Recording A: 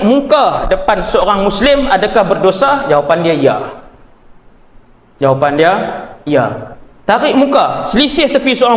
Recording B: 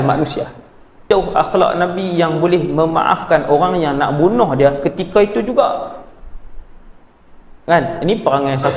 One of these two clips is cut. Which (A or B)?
B